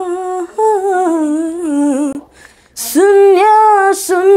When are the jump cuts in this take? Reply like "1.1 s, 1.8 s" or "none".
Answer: none